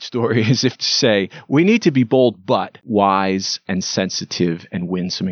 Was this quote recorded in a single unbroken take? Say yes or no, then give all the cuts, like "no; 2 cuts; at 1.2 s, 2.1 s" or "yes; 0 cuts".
no; 1 cut; at 2.8 s